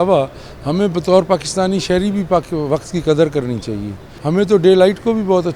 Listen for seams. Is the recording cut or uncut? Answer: cut